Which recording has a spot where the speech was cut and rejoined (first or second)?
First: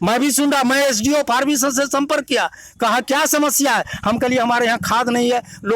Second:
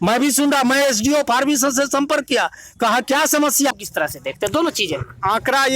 second